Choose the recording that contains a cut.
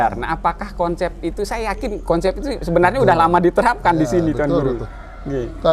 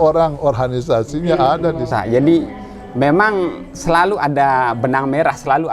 second; 1 cut; at 1.9 s

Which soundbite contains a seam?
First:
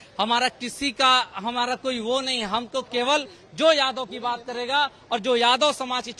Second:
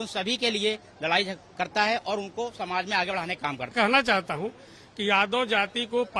second; 1 cut; at 3.7 s

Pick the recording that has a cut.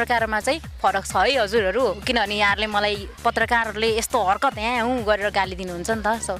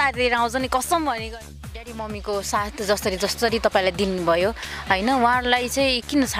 second; 1 cut; at 1.2 s

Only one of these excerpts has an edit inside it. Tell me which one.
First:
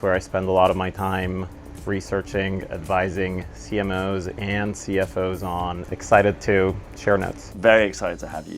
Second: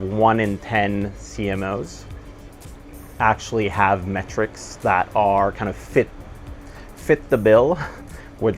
first; 2 cuts; at 5.8 s, 7.4 s

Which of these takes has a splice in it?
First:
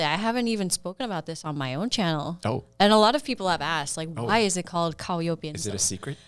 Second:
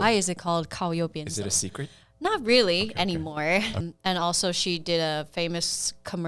second; 1 cut; at 3.8 s

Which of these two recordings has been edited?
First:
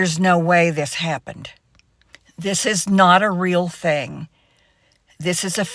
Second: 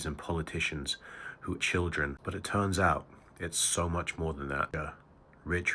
second; 2 cuts; at 1.6 s, 4.7 s

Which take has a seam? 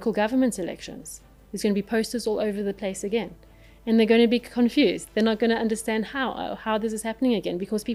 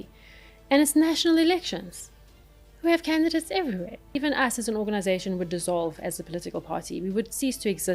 second; 1 cut; at 4.1 s

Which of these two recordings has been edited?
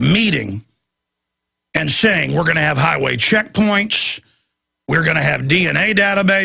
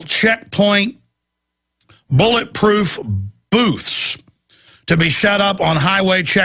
second; 1 cut; at 1.3 s

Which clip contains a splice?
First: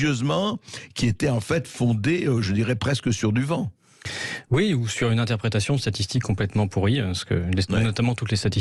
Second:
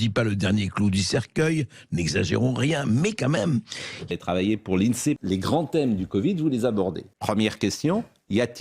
second; 3 cuts; at 3.9 s, 5.2 s, 7.1 s

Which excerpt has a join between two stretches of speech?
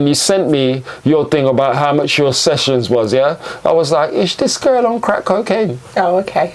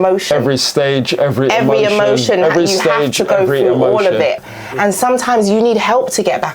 second; 1 cut; at 4.4 s

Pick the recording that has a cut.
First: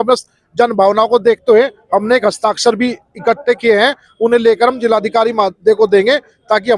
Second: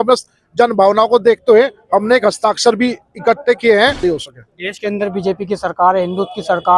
second; 1 cut; at 4.0 s

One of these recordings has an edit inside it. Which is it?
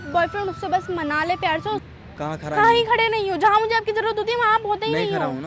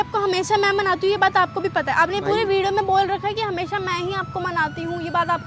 first; 1 cut; at 1.8 s

